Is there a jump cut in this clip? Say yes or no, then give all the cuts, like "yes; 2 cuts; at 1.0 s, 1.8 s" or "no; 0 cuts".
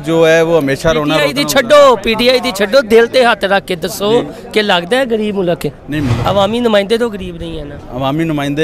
yes; 1 cut; at 6.2 s